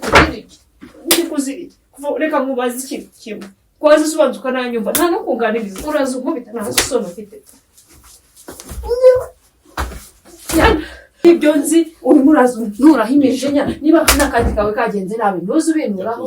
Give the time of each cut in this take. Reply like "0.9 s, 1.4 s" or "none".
11.2 s